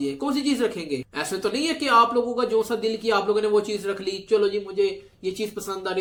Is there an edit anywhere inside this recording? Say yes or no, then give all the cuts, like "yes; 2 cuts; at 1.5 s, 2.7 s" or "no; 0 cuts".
no; 0 cuts